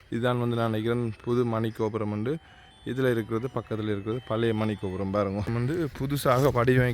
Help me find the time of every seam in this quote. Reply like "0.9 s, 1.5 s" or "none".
5.5 s